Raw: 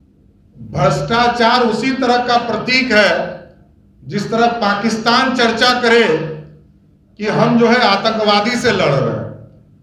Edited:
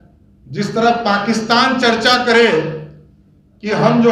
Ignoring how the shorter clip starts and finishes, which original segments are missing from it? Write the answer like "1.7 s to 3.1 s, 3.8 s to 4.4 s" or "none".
none